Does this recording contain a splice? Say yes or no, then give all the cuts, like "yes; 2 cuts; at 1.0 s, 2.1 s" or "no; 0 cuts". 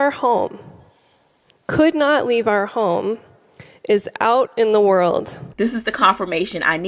yes; 1 cut; at 5.4 s